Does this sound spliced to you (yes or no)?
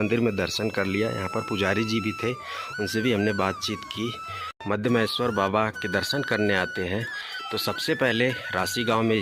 yes